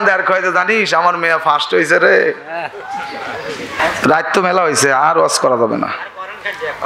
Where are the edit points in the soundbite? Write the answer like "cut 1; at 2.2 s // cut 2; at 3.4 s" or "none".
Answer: cut 1; at 3.7 s